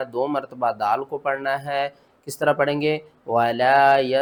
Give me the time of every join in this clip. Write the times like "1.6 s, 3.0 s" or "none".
none